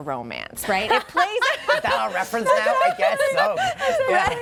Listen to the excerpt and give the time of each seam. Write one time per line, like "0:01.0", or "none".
none